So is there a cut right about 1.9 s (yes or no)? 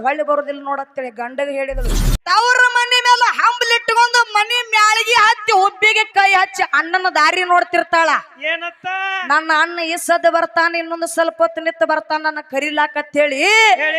yes